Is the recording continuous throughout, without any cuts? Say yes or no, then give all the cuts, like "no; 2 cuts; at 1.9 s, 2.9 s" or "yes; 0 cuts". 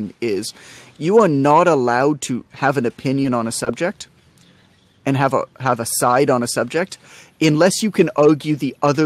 yes; 0 cuts